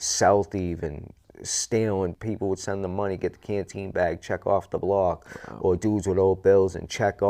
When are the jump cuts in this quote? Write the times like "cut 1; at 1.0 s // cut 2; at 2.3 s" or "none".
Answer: cut 1; at 1.2 s // cut 2; at 2.1 s